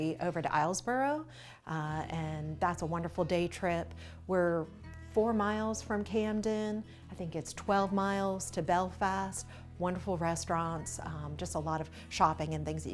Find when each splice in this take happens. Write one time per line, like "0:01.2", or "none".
none